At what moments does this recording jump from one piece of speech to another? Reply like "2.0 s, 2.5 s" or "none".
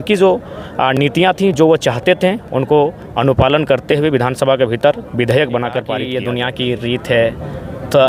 6.0 s